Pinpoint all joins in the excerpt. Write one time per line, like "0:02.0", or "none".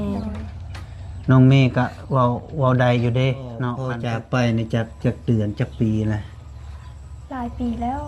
0:03.9